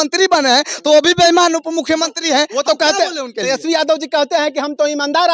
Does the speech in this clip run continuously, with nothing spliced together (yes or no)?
yes